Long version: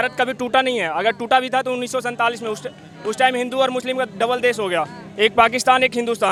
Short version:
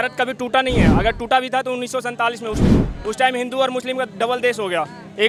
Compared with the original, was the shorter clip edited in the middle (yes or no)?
no